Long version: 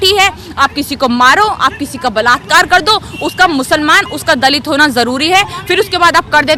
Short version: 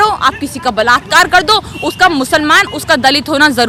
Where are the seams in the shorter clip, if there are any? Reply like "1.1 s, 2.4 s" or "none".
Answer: none